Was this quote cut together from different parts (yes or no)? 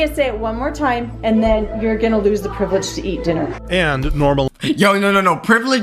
no